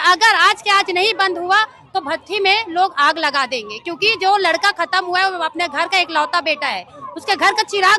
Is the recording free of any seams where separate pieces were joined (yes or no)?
yes